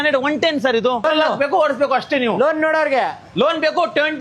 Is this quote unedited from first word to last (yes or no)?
no